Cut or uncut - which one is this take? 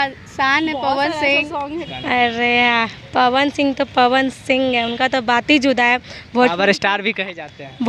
cut